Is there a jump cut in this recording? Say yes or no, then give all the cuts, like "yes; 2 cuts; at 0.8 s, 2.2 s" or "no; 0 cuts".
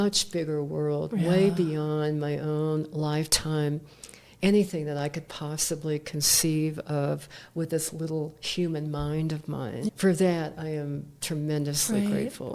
yes; 1 cut; at 9.9 s